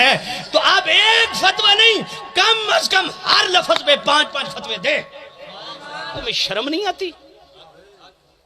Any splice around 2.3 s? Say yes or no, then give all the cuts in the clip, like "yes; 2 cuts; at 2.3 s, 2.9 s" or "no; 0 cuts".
no; 1 cut; at 6.2 s